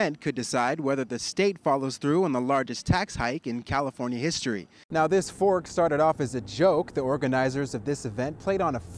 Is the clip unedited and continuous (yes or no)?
no